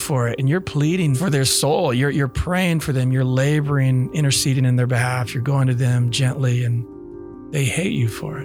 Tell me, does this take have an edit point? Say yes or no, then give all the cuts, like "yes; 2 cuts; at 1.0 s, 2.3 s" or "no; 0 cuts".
yes; 1 cut; at 1.2 s